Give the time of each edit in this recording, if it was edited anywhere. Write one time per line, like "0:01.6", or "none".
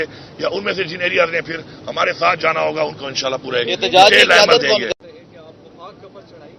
0:05.0

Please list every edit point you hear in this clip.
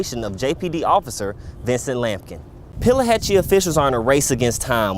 0:02.6

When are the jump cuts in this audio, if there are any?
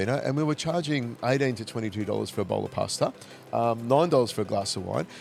none

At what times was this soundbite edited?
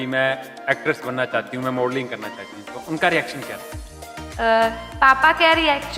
none

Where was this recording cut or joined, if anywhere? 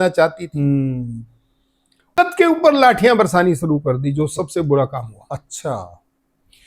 0:02.2

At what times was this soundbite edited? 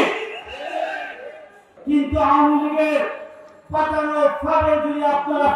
0:01.7

